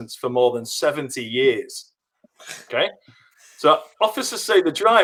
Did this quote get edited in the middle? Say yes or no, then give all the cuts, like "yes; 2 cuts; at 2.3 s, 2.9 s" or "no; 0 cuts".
no; 0 cuts